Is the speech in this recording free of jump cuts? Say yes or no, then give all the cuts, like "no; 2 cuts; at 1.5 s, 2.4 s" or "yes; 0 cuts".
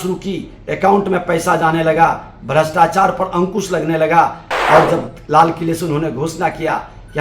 yes; 0 cuts